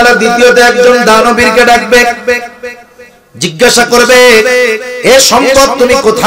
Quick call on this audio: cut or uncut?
uncut